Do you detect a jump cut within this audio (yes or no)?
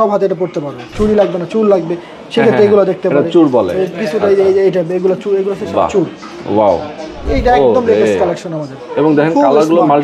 yes